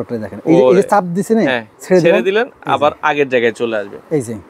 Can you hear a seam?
yes; 1 cut; at 1.7 s

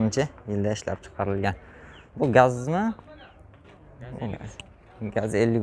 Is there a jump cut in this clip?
no; 0 cuts

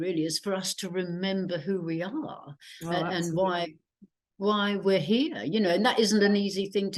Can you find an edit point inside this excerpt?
no; 0 cuts

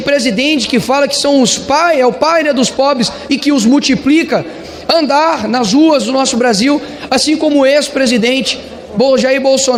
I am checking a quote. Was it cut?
no; 0 cuts

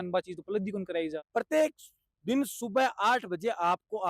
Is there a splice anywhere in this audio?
yes; 1 cut; at 1.2 s

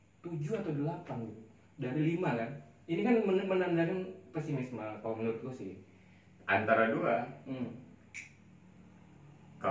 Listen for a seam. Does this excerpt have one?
no; 0 cuts

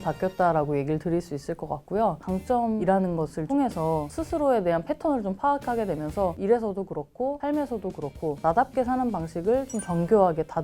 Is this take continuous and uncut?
no; 2 cuts; at 2.2 s, 6.4 s

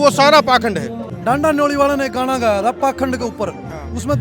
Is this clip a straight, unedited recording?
no; 1 cut; at 1.1 s

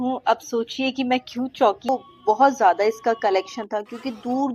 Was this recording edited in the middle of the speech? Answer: yes; 1 cut; at 1.9 s

